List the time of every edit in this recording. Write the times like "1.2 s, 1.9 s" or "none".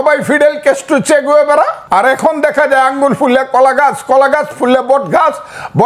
1.8 s

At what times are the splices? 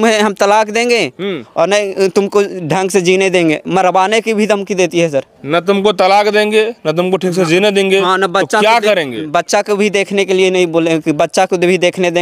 none

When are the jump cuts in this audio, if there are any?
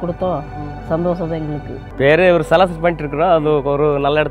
1.9 s

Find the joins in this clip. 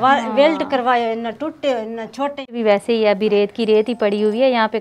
2.6 s

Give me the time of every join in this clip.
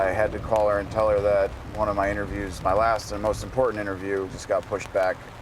4.4 s

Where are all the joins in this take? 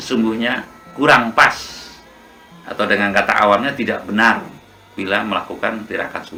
none

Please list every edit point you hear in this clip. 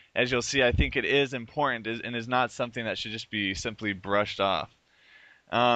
0.9 s

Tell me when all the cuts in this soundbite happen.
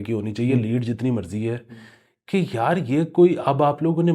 none

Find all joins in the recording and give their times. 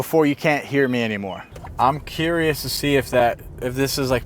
1.4 s

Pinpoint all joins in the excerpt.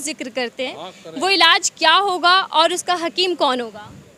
none

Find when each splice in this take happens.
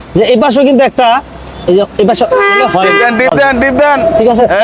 none

